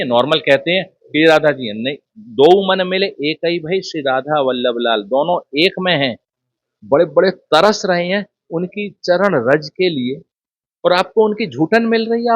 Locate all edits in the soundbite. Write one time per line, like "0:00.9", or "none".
0:06.6